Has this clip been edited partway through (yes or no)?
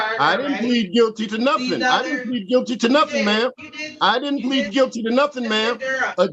no